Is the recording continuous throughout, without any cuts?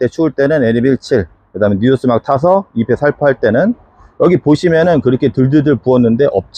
yes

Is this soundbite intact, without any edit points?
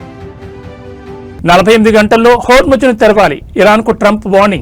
yes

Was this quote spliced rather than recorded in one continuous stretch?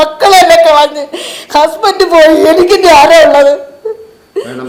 no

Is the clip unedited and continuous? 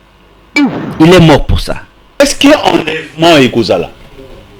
no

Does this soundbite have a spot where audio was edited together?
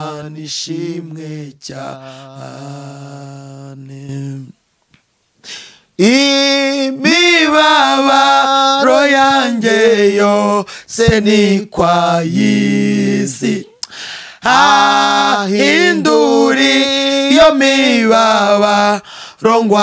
no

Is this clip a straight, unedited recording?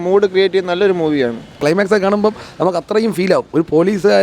no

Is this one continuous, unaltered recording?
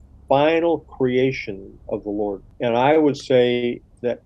no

